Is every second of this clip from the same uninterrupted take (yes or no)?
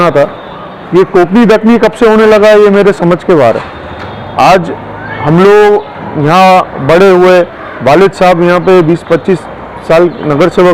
yes